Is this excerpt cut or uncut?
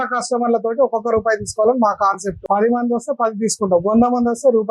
cut